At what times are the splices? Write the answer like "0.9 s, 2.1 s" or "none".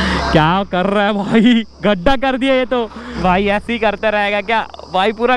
3.0 s